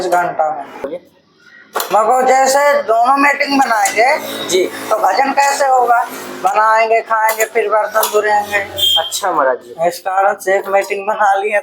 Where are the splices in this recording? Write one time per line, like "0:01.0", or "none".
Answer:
none